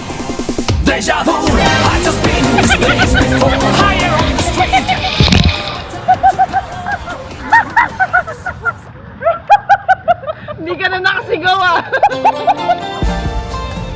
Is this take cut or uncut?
cut